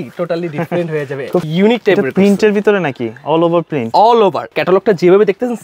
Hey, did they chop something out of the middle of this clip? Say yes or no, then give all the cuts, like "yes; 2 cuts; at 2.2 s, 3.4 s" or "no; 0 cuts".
yes; 2 cuts; at 1.5 s, 4.6 s